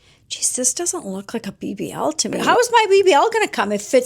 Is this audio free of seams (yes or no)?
no